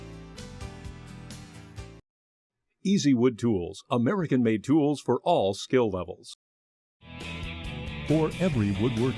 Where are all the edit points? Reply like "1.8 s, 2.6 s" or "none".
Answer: 1.7 s